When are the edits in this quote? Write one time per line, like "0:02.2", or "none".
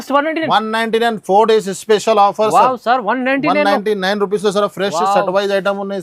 none